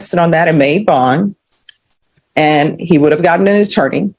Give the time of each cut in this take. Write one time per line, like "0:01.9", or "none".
none